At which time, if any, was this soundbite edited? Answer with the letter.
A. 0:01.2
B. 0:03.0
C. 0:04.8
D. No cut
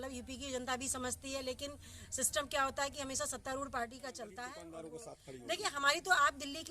C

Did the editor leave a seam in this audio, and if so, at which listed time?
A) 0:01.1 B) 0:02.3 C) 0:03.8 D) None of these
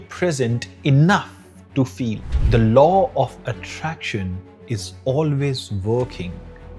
B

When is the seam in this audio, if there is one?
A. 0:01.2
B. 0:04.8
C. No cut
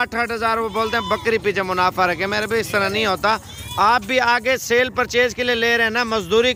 C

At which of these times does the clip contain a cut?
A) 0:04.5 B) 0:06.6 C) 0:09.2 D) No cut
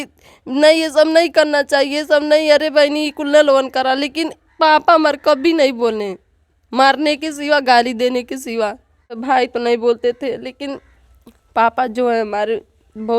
C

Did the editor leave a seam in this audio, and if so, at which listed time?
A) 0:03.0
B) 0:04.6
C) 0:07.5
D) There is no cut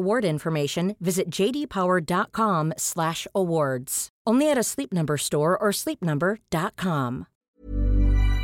C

